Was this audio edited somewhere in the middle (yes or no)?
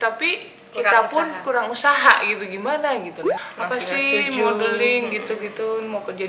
yes